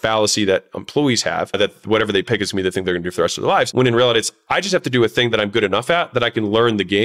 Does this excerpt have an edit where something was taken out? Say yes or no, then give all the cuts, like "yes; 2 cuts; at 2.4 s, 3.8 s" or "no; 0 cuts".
yes; 2 cuts; at 1.5 s, 3.7 s